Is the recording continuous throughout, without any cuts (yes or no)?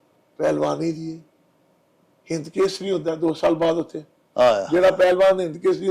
yes